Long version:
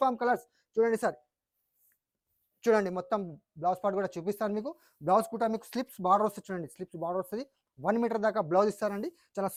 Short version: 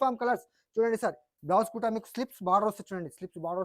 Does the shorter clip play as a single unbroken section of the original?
no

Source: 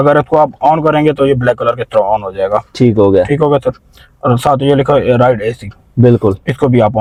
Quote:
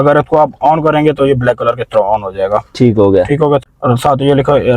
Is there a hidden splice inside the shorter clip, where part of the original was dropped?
yes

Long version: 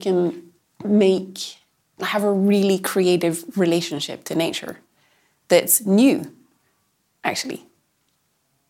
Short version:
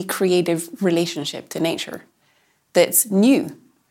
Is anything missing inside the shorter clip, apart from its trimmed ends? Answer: no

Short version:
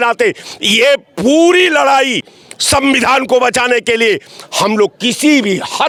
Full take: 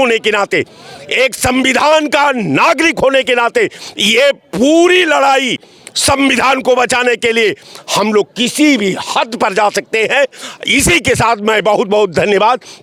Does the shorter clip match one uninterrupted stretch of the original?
yes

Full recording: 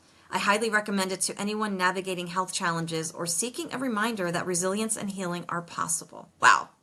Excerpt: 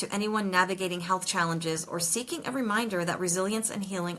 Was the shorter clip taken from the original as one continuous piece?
yes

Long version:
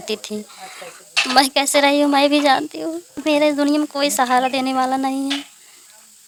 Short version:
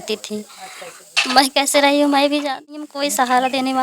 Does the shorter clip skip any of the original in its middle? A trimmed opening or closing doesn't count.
yes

